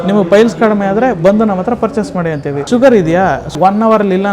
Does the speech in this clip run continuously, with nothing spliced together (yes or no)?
no